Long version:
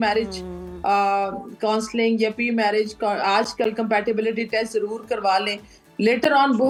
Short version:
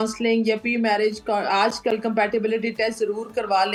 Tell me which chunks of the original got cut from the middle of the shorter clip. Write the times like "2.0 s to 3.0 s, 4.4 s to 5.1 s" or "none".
none